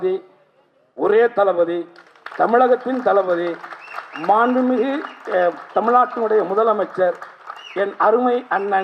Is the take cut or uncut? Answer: uncut